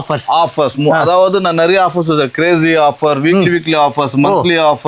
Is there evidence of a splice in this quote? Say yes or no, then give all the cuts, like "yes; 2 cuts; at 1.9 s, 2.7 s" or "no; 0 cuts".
no; 0 cuts